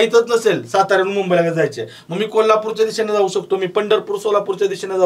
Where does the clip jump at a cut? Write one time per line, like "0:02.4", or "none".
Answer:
none